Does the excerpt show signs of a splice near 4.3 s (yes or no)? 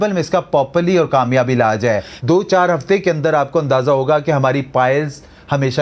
no